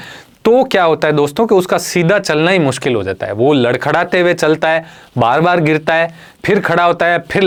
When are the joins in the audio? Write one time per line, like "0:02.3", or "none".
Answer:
none